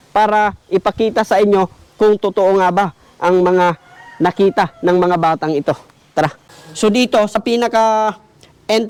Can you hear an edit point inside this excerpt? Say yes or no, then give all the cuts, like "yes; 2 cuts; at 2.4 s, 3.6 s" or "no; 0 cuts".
no; 0 cuts